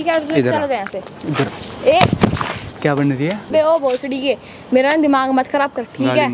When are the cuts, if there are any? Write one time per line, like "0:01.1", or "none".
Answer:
0:03.5